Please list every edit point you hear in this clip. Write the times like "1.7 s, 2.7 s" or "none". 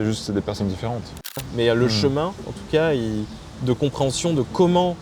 1.5 s

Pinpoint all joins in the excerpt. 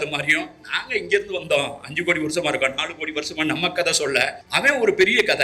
4.4 s

